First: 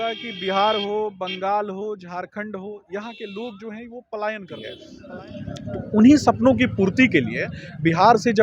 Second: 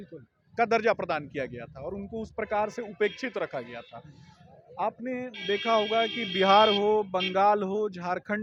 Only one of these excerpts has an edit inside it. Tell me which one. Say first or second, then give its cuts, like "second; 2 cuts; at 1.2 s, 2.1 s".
first; 1 cut; at 5.0 s